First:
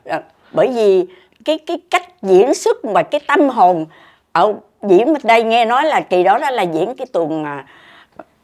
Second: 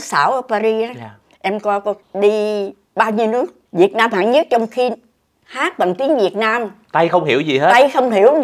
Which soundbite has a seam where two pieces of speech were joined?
second; 3 cuts; at 2.1 s, 3.6 s, 6.8 s

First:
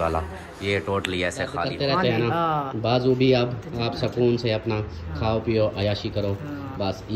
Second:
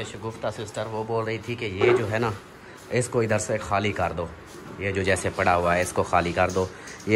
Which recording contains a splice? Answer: first; 1 cut; at 1.6 s

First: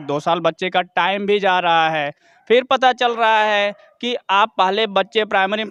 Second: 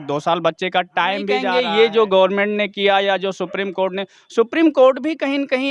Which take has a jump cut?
second; 1 cut; at 1.5 s

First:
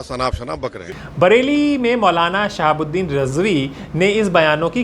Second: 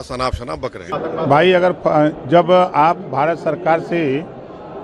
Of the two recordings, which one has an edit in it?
second; 1 cut; at 0.9 s

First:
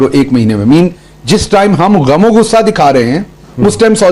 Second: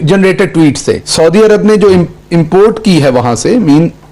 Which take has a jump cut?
second; 1 cut; at 1.1 s

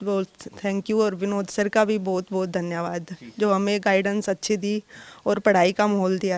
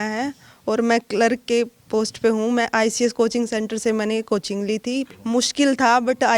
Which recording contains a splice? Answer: second; 1 cut; at 5.1 s

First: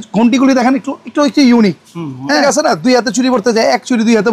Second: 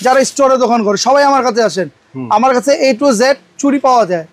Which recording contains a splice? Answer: first; 1 cut; at 2.4 s

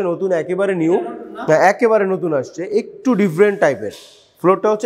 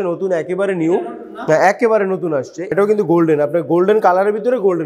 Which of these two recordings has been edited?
second; 1 cut; at 2.7 s

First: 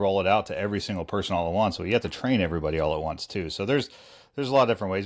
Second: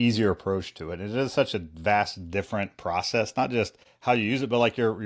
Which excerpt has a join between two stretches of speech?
second; 1 cut; at 3.8 s

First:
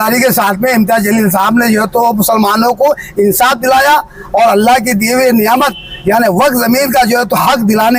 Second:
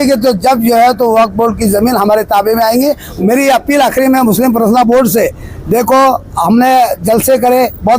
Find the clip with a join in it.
second; 1 cut; at 3.1 s

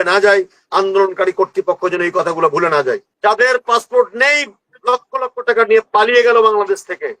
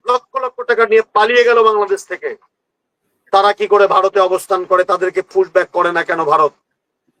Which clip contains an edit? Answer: first; 1 cut; at 3.1 s

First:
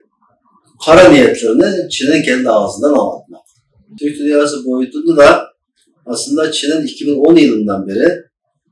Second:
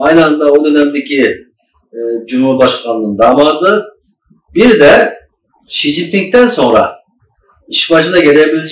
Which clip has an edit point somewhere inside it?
first; 1 cut; at 3.9 s

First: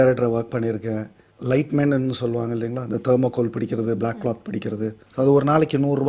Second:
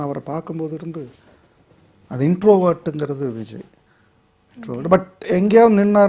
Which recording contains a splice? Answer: first; 2 cuts; at 1.3 s, 5.0 s

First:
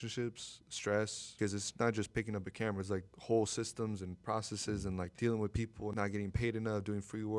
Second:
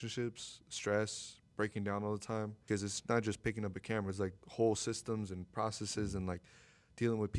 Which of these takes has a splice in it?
first; 2 cuts; at 1.3 s, 5.1 s

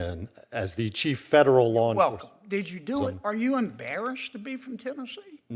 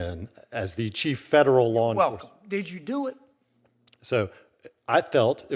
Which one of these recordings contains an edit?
first; 1 cut; at 3.2 s

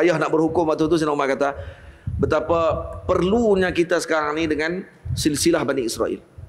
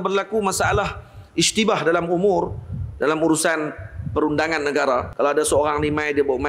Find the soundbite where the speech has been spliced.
second; 1 cut; at 5.1 s

